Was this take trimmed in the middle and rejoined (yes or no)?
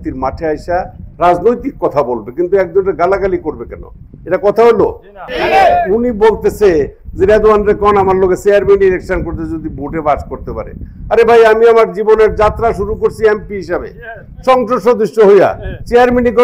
yes